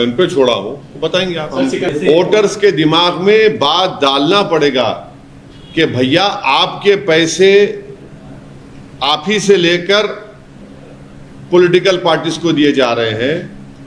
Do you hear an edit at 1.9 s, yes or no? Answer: yes